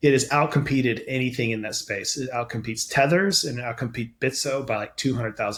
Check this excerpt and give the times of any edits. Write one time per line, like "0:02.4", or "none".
none